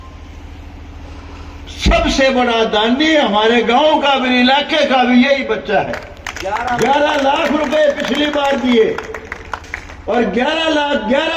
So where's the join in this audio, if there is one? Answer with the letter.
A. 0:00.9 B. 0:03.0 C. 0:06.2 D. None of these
D